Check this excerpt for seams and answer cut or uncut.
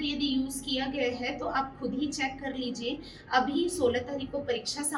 uncut